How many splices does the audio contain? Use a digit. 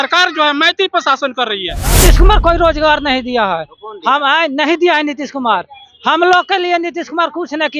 1